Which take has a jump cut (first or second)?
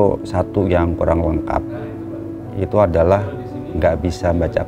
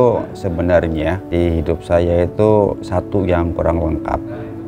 second